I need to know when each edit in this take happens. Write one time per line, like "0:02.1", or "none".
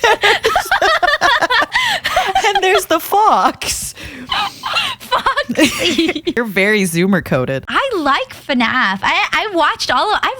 0:01.7
0:06.3
0:07.7